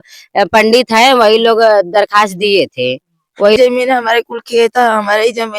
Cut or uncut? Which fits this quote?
cut